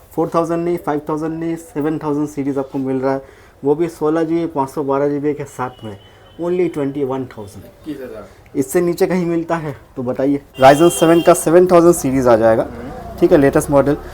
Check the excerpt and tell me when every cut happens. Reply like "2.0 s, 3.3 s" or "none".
10.5 s